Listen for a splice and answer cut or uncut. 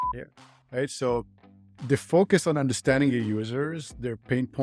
uncut